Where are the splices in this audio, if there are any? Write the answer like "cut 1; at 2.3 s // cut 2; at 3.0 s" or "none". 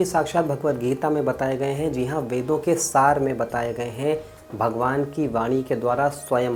none